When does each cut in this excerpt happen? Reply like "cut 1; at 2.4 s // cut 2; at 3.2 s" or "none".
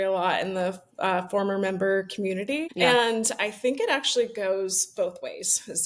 none